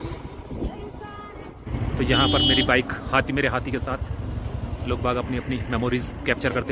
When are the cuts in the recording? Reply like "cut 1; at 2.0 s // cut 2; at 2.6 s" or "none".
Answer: cut 1; at 1.7 s